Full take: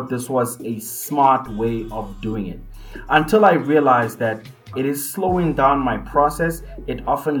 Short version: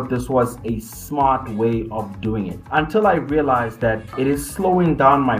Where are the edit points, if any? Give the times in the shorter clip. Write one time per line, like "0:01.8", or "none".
0:02.6
0:04.1

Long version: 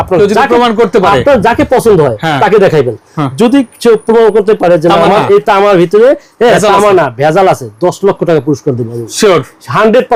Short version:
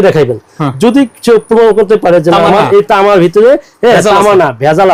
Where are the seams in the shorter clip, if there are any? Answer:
none

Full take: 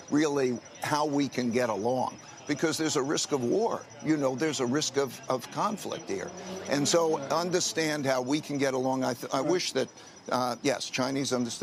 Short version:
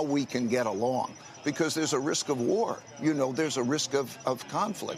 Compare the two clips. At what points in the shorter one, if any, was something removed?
none

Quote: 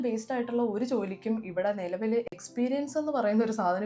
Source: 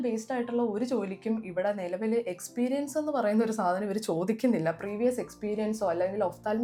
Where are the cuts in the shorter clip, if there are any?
none

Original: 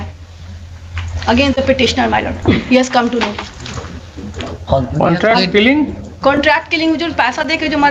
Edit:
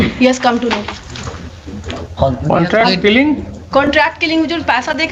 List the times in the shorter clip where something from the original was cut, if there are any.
none

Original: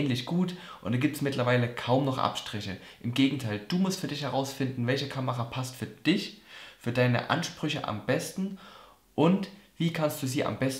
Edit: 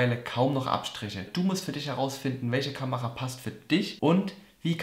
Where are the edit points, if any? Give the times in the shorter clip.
0:01.3
0:03.9

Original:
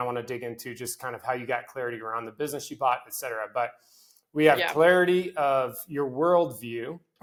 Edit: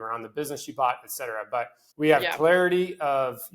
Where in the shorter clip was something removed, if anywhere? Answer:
0:01.8

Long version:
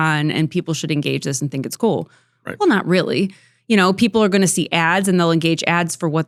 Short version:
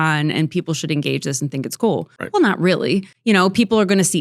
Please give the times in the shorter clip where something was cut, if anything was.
0:02.2
0:03.1

